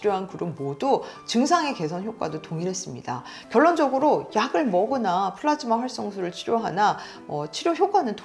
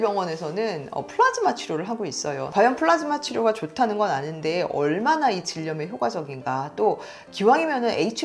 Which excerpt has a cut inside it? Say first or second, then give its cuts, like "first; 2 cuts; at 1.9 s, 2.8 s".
second; 1 cut; at 2.4 s